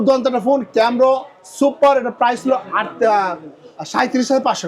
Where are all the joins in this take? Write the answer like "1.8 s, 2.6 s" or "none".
none